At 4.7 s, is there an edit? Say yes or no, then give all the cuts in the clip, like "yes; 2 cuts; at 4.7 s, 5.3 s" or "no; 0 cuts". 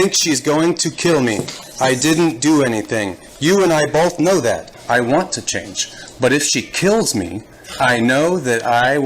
yes; 1 cut; at 4.7 s